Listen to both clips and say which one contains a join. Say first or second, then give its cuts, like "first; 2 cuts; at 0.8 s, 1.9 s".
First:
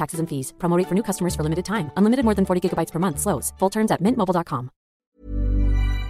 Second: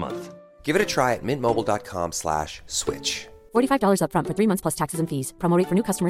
first; 1 cut; at 5.1 s